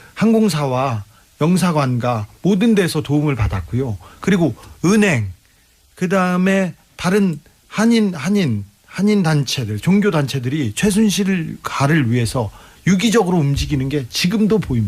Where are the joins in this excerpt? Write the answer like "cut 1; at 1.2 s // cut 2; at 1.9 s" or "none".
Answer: cut 1; at 6.6 s

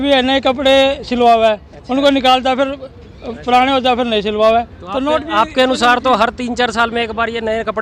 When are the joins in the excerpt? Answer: none

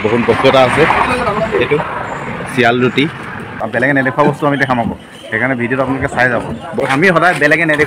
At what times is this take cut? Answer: cut 1; at 3.6 s // cut 2; at 6.7 s

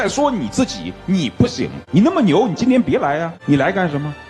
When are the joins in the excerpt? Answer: cut 1; at 1.8 s // cut 2; at 3.3 s

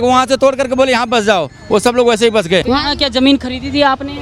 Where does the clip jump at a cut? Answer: cut 1; at 2.6 s

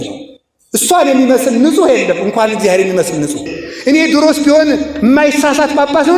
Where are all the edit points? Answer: cut 1; at 3.6 s

